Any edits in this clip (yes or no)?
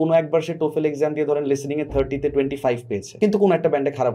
yes